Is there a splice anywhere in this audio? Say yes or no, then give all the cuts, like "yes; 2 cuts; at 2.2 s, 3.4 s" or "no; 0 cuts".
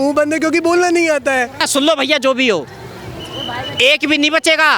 yes; 1 cut; at 1.6 s